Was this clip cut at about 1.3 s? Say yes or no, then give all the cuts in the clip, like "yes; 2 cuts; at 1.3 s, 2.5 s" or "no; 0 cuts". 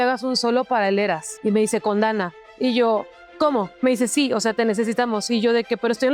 yes; 2 cuts; at 1.3 s, 3.7 s